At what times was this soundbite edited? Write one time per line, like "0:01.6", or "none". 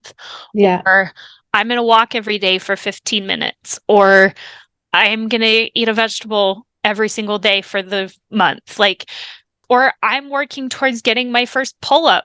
0:09.6